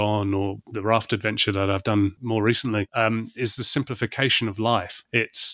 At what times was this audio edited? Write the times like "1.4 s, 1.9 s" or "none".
2.3 s